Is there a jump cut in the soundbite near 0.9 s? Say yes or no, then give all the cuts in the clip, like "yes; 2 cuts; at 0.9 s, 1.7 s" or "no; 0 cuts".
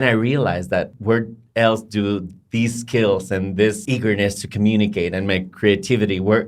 yes; 2 cuts; at 0.9 s, 3.8 s